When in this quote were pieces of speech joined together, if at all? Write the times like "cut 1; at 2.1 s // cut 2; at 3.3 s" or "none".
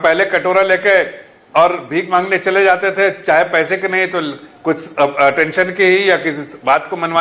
none

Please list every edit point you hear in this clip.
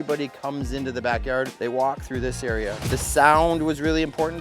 cut 1; at 2.8 s

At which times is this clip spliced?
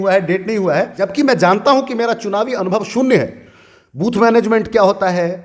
cut 1; at 1.0 s

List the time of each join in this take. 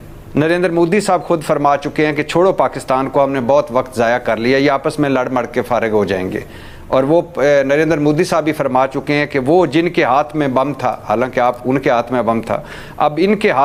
none

